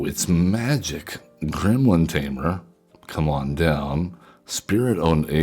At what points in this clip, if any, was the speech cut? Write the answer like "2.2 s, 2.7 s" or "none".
none